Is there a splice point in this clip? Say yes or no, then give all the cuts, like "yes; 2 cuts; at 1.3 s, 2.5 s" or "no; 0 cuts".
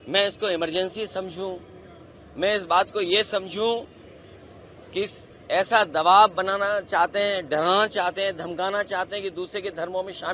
no; 0 cuts